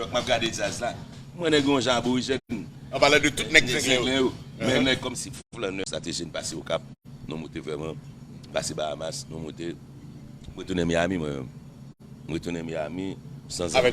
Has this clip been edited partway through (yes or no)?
yes